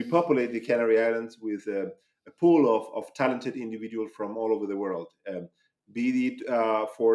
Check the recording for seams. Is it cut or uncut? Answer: uncut